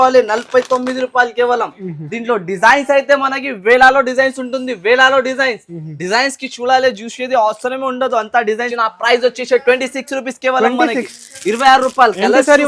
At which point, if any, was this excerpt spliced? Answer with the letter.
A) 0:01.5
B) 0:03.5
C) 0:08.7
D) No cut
C